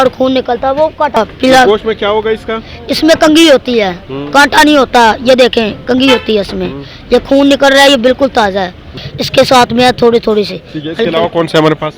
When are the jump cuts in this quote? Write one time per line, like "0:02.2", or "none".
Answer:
0:01.2
0:09.0